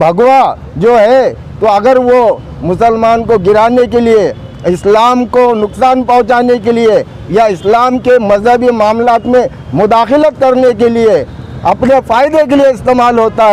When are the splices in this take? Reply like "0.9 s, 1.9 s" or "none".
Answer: none